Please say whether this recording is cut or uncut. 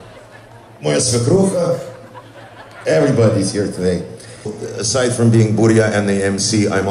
cut